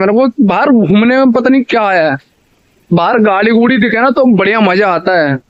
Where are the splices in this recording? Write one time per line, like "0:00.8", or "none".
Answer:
none